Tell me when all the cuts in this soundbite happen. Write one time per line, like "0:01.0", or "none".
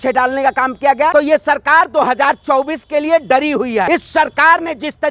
0:01.1
0:03.9